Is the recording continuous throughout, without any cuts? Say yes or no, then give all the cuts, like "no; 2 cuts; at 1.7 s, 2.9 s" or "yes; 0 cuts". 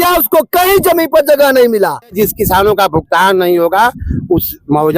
no; 1 cut; at 2.1 s